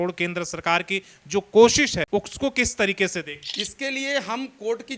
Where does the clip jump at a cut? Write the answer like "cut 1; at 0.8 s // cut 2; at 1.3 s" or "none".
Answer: cut 1; at 2.1 s // cut 2; at 3.4 s